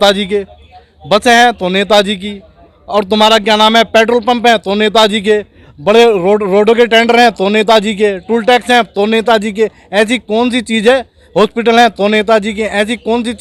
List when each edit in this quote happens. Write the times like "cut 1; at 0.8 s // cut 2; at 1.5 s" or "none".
none